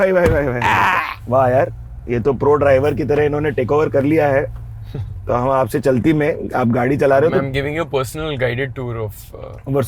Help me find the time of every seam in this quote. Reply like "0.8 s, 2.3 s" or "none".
1.1 s